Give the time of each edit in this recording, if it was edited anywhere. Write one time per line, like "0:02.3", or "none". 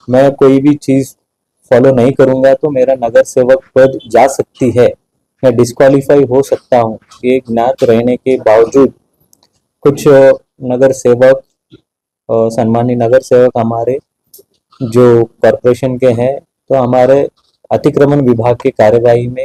none